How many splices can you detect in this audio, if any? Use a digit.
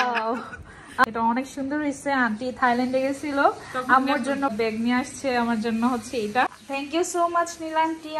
3